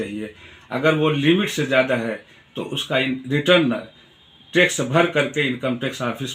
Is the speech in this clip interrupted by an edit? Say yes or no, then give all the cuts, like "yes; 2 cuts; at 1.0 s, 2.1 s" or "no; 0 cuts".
no; 0 cuts